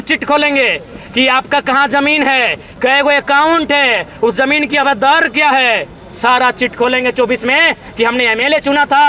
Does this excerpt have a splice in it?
no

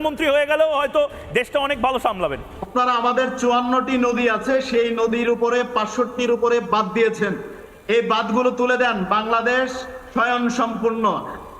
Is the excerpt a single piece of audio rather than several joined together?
no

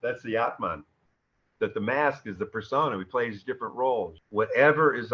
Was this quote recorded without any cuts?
no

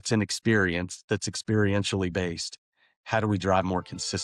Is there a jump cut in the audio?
no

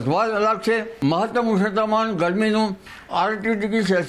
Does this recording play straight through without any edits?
no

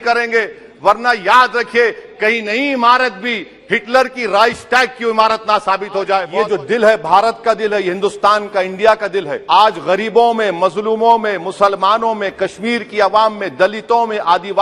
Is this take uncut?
no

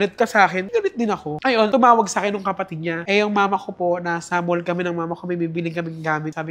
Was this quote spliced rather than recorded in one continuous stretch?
no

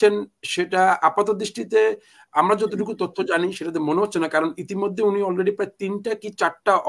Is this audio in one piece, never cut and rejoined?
yes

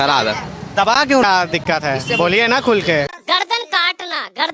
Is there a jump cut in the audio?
yes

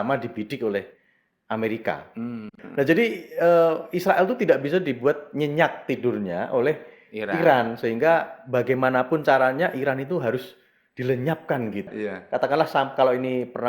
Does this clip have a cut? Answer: yes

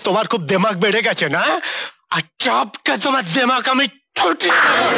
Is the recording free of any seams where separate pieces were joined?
yes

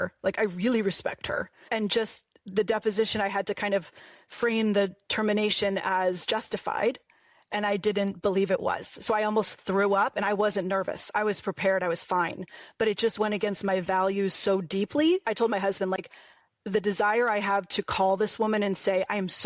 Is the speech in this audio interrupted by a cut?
no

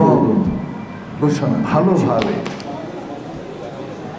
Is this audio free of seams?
no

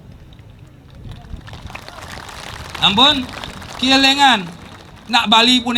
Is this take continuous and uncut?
yes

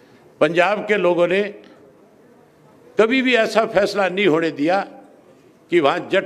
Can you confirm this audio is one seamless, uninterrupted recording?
yes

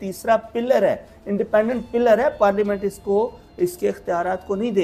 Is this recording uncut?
yes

